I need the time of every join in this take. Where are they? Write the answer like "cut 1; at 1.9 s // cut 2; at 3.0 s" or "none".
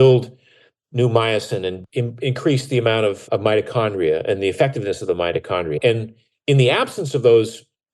cut 1; at 1.8 s // cut 2; at 3.2 s // cut 3; at 5.8 s